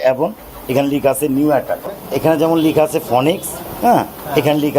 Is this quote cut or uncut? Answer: cut